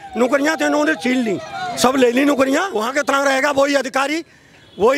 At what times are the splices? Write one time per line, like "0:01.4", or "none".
0:02.8